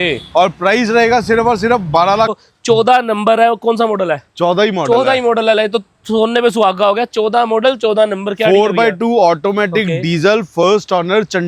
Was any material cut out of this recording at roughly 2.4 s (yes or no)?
yes